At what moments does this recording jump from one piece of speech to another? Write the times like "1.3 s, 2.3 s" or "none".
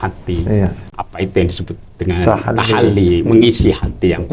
none